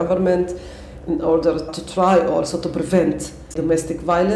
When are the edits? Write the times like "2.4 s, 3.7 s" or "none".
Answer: 3.4 s

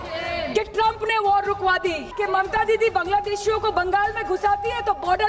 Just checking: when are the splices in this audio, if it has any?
2.1 s

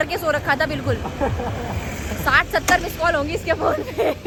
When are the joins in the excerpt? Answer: none

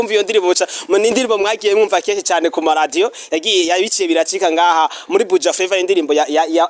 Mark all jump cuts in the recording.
none

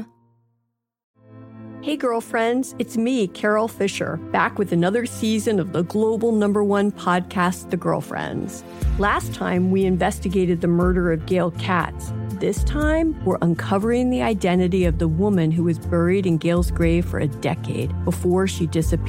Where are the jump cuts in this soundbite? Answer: 0.9 s

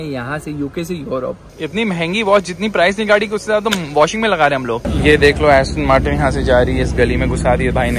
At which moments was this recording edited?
1.5 s, 4.9 s

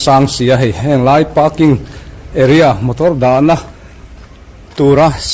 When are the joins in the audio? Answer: none

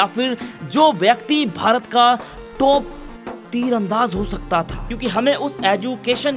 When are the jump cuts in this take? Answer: 4.8 s

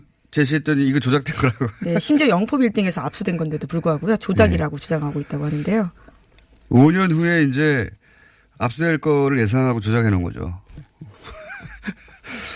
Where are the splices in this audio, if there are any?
none

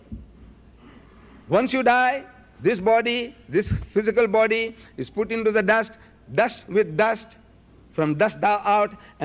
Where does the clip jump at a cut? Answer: 3.7 s

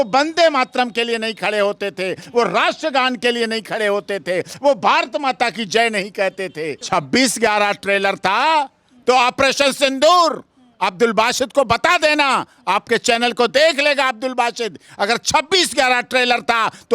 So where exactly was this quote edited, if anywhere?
6.8 s

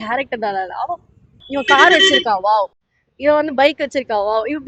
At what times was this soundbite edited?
1.4 s

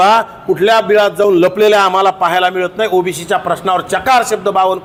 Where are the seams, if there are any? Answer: none

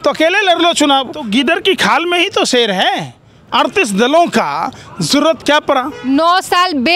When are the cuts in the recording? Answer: 1.3 s, 6.0 s

